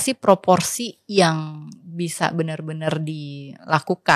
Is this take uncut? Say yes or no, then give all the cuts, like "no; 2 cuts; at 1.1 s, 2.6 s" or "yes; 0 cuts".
yes; 0 cuts